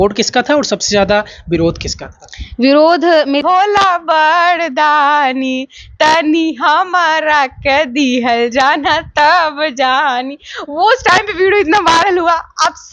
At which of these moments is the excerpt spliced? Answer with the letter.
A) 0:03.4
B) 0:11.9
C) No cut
A